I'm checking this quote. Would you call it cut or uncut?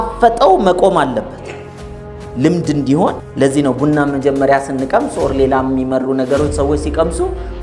cut